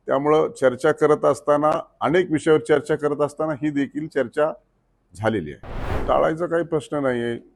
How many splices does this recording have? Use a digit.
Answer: 1